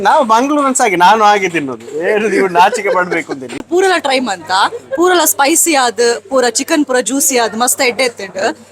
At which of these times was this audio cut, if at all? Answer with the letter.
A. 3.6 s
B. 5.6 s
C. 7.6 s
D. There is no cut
A